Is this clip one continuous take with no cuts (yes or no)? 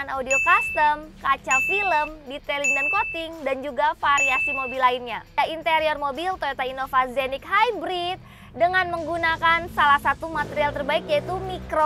no